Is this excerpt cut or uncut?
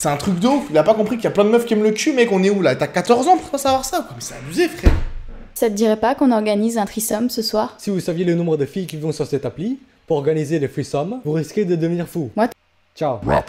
uncut